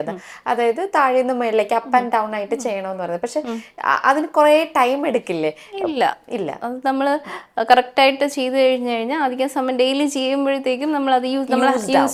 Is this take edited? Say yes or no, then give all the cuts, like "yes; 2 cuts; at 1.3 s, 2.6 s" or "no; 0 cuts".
no; 0 cuts